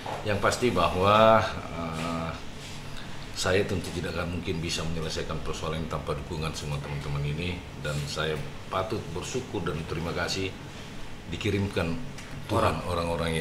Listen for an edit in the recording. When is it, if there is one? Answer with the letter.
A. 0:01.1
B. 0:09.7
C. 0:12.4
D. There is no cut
D